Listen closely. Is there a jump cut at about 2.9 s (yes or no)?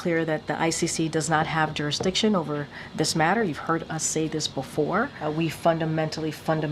no